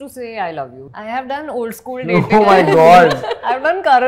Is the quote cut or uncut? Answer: cut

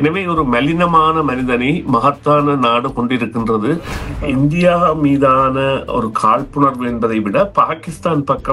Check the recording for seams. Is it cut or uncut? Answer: cut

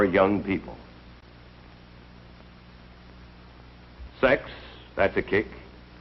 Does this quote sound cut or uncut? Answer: uncut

